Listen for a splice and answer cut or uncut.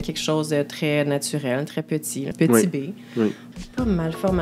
cut